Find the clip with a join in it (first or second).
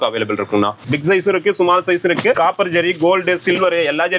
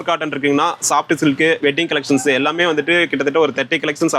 first